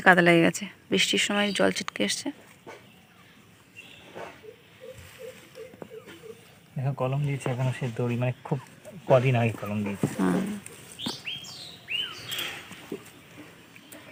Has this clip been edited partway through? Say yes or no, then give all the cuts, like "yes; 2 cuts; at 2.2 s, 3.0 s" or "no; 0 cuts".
no; 0 cuts